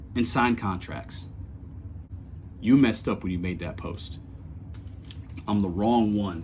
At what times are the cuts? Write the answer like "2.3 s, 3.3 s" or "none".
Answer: 2.1 s